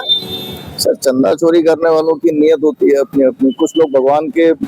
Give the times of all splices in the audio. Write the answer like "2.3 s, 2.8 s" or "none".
none